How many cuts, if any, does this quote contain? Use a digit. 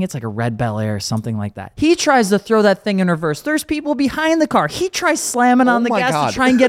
1